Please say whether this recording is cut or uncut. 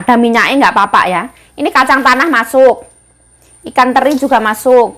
uncut